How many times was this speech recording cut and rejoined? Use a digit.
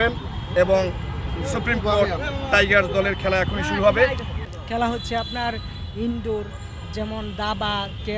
1